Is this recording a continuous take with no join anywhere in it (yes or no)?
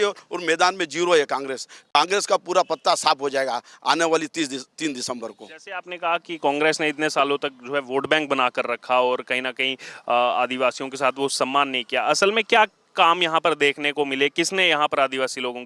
yes